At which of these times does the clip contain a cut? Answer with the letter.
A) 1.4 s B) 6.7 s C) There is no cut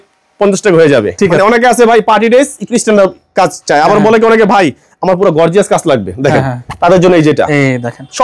A